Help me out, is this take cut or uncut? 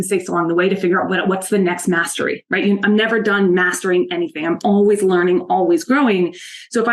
uncut